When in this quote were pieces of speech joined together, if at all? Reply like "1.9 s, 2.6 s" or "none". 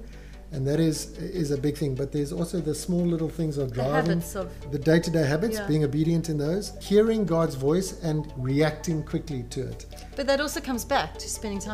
4.7 s, 6.8 s, 8.3 s